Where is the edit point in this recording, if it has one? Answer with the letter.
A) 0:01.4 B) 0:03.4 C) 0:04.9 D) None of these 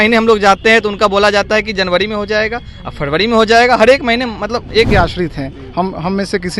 C